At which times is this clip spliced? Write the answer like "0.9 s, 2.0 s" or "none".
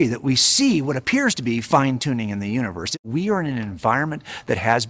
2.9 s